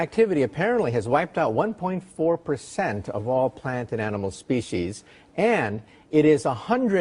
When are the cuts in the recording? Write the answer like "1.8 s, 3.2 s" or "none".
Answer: 5.5 s